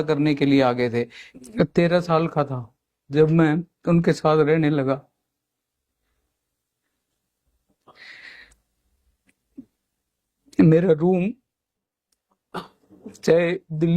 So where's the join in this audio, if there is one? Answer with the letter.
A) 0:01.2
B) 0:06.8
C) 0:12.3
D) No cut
A